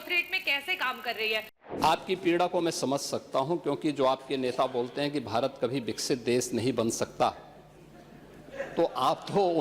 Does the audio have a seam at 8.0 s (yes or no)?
no